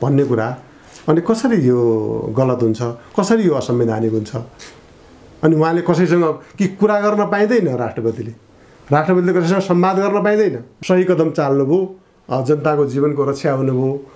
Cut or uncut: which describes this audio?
cut